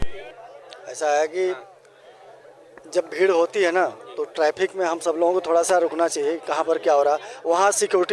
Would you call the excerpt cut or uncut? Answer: uncut